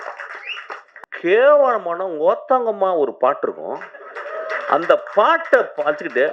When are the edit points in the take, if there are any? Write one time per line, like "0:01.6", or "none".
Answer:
0:01.0